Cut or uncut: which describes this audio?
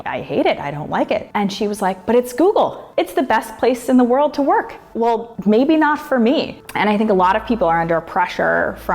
cut